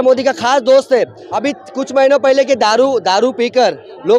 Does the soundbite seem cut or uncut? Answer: cut